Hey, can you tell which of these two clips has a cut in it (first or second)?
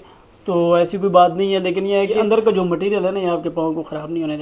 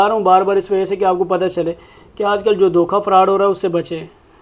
first